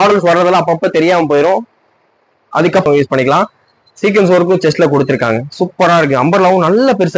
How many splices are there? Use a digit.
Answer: 1